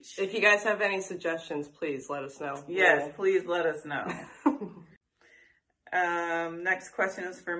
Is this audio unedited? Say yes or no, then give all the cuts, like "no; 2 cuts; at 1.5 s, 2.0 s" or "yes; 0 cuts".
no; 1 cut; at 5.0 s